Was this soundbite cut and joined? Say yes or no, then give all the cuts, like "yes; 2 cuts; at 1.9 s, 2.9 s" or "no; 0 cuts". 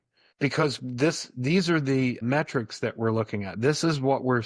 yes; 1 cut; at 2.2 s